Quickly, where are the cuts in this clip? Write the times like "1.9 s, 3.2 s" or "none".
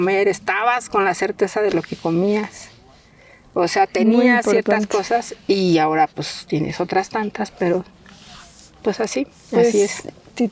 none